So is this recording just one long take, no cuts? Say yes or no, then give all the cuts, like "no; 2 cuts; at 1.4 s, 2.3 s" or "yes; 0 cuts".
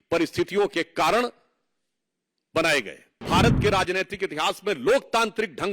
no; 1 cut; at 3.2 s